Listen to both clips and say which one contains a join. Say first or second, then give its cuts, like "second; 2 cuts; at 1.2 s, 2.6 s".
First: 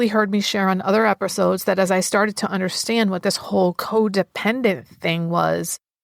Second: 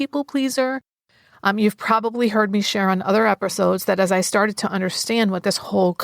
second; 1 cut; at 1.0 s